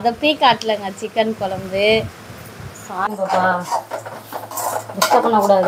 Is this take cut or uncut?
cut